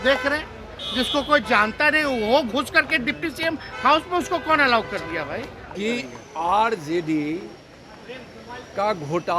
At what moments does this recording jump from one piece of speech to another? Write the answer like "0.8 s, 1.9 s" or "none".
5.6 s